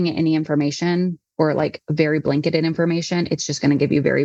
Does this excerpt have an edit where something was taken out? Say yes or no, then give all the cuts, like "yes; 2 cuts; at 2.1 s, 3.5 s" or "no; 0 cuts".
no; 0 cuts